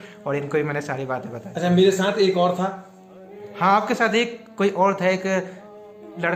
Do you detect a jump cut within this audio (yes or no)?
no